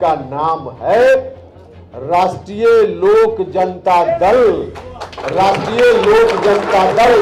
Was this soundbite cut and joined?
no; 0 cuts

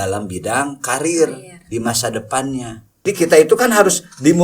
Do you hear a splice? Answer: yes; 1 cut; at 3.1 s

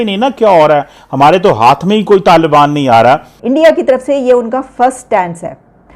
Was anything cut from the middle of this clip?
yes; 1 cut; at 3.3 s

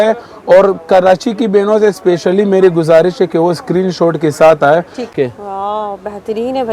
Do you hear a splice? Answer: yes; 1 cut; at 5.1 s

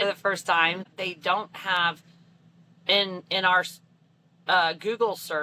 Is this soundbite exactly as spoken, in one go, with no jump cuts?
no; 1 cut; at 0.9 s

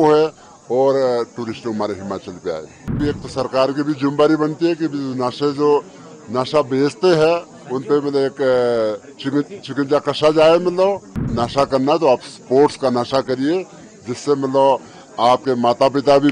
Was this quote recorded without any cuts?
no; 2 cuts; at 3.0 s, 11.4 s

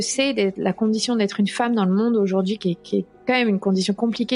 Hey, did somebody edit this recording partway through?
no; 0 cuts

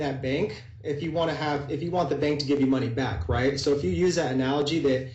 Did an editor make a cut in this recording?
no; 0 cuts

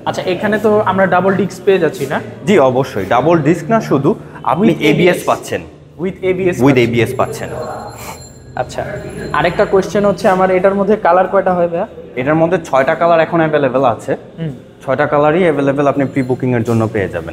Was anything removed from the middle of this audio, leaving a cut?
no; 0 cuts

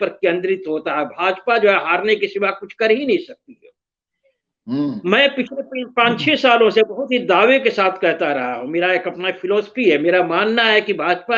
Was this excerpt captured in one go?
yes; 0 cuts

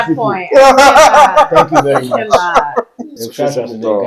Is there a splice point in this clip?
yes; 1 cut; at 3.1 s

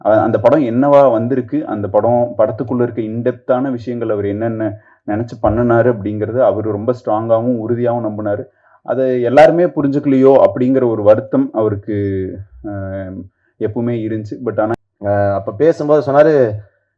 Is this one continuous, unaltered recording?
no; 1 cut; at 14.8 s

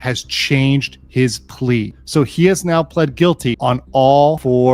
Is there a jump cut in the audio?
yes; 1 cut; at 1.8 s

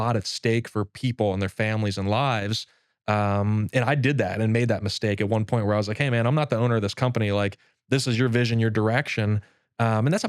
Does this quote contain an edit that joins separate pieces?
no; 0 cuts

